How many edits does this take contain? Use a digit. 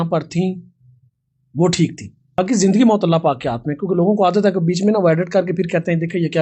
1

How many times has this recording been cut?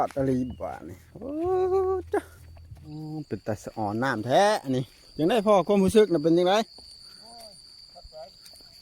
1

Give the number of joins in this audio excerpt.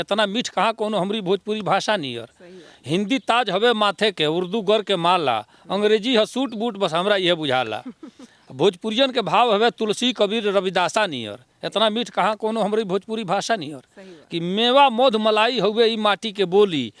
0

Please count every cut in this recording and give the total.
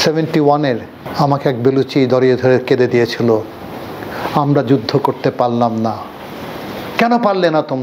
1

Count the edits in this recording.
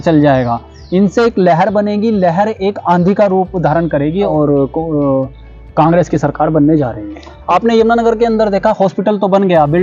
2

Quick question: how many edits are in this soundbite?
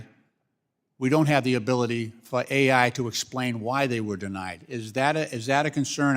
0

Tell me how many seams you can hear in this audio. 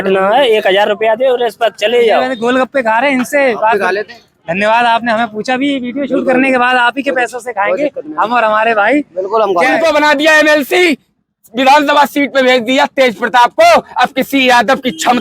2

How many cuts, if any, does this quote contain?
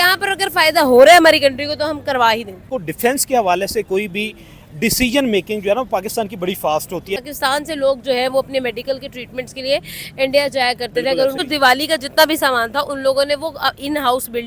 3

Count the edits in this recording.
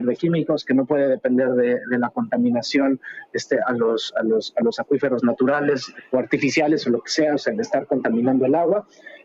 2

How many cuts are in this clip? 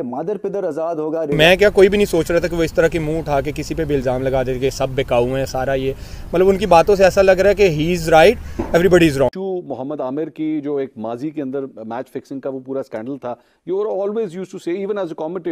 2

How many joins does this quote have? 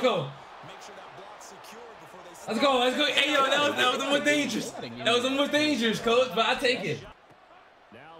1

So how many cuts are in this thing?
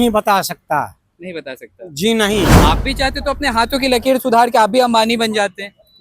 1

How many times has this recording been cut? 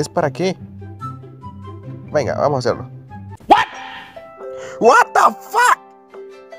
0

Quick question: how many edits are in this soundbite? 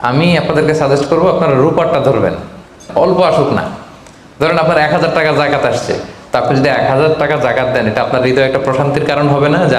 1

